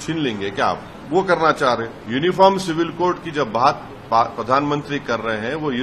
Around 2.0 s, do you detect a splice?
yes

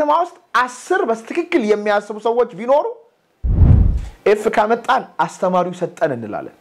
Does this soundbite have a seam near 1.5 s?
no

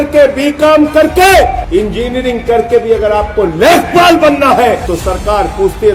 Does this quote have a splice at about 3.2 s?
no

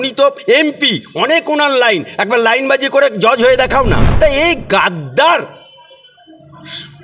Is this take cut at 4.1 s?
yes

